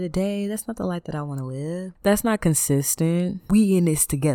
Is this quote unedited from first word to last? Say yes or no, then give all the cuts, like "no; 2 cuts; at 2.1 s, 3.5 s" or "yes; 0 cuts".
no; 1 cut; at 3.4 s